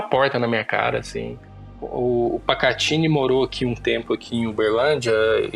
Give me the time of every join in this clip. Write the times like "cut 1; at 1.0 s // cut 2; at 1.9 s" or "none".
cut 1; at 1.8 s